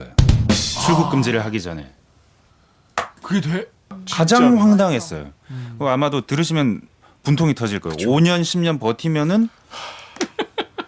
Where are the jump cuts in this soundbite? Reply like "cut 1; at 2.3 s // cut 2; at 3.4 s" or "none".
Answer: cut 1; at 4.0 s